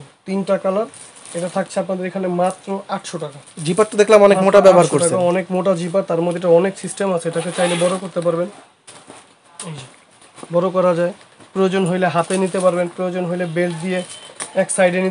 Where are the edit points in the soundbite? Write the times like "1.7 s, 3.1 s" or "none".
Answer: none